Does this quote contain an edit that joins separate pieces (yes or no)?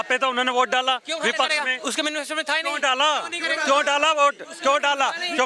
no